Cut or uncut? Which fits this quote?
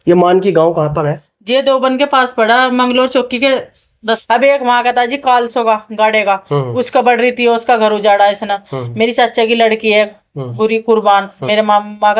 cut